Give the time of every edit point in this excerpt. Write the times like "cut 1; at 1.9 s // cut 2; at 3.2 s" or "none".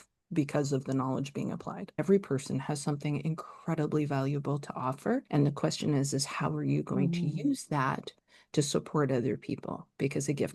cut 1; at 2.0 s // cut 2; at 5.3 s